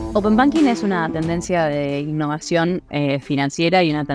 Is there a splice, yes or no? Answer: no